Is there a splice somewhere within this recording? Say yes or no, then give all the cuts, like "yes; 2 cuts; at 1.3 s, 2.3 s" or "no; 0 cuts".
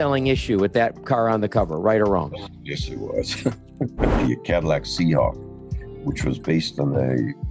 yes; 1 cut; at 4.1 s